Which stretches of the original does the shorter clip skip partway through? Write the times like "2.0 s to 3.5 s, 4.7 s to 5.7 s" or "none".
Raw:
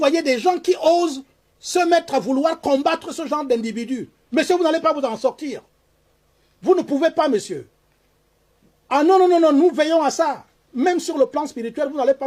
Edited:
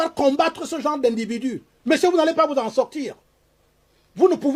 none